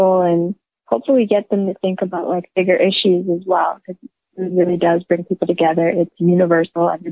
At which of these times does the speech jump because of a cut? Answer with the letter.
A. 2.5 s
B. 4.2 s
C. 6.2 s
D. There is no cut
B